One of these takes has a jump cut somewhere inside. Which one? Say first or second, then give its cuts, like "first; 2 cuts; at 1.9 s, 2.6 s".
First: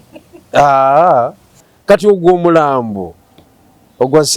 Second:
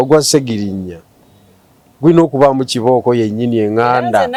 first; 1 cut; at 1.7 s